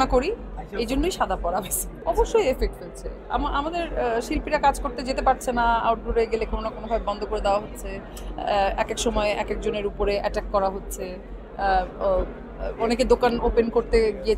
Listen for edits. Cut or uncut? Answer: cut